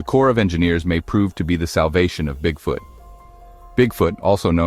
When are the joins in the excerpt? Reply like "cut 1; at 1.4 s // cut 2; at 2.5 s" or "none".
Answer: none